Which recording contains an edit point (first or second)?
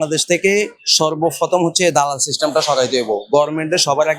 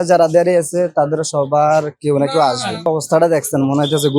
second